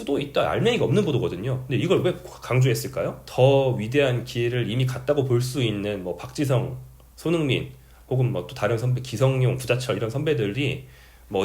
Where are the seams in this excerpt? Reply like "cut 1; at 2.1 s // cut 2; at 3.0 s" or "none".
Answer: cut 1; at 3.2 s